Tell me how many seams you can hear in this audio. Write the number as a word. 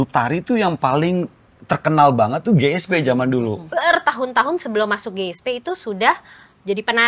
one